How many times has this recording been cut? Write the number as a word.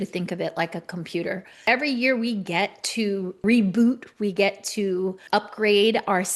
three